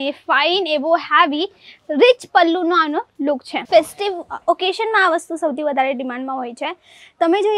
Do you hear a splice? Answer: yes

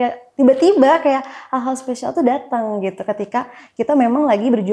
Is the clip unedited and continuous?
yes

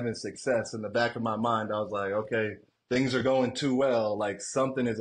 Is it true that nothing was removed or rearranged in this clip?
no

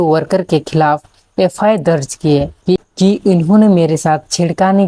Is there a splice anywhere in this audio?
yes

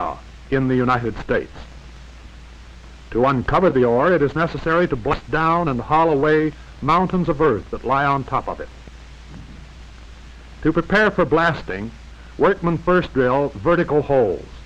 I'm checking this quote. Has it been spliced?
no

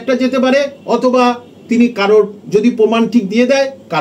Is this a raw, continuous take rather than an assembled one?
yes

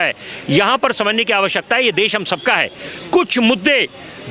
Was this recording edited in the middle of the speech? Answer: no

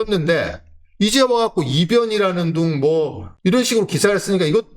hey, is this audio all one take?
no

